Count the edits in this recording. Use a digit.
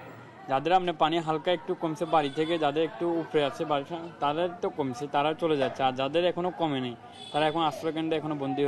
0